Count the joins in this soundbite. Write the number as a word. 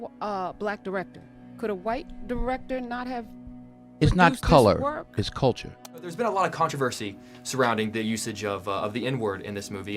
one